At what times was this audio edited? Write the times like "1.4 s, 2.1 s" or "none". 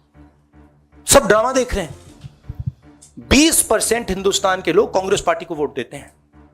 1.0 s